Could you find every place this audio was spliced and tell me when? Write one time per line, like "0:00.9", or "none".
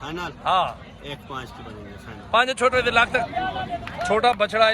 0:03.2